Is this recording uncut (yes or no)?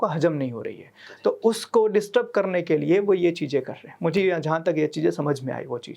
yes